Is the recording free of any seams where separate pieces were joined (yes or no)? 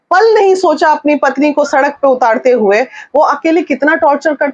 yes